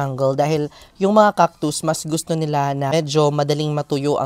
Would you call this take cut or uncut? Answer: cut